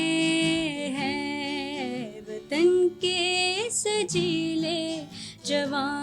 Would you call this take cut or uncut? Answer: uncut